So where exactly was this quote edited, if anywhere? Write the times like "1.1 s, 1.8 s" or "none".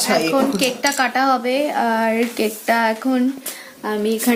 none